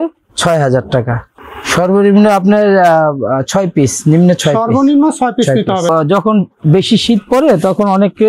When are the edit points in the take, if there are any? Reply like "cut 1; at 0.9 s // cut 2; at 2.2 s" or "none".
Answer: cut 1; at 1.2 s // cut 2; at 5.9 s